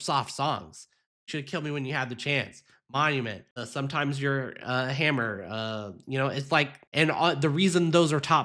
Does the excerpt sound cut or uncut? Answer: cut